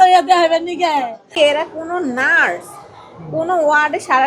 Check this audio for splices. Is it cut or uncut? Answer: cut